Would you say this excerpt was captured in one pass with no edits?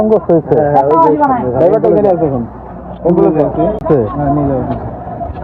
no; 1 cut; at 3.8 s

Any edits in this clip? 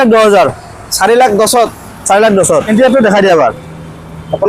yes; 1 cut; at 2.7 s

